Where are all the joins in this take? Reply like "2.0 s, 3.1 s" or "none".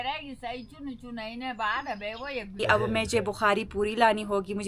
2.6 s